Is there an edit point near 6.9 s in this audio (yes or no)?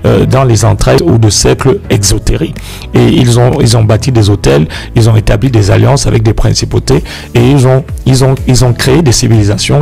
no